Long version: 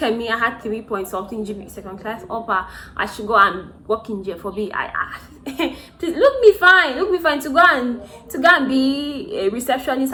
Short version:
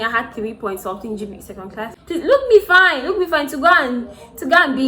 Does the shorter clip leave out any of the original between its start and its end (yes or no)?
yes